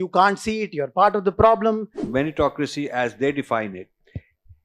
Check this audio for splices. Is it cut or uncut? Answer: cut